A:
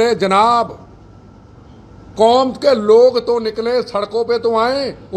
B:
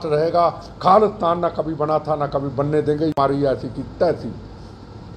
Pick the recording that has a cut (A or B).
B